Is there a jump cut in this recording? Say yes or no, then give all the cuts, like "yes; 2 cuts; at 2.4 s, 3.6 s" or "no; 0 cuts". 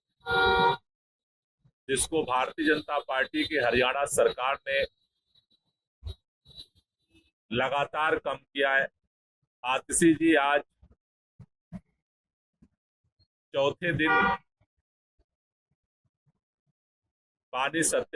yes; 1 cut; at 9.5 s